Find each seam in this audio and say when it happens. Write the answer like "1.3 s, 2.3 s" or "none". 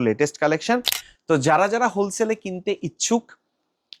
1.0 s